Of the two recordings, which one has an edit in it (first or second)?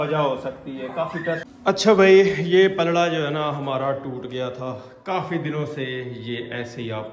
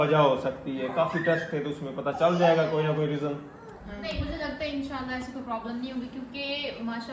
first